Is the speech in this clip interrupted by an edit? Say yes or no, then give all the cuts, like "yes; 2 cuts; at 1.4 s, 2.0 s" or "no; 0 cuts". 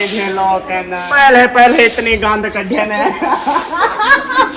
yes; 1 cut; at 1.1 s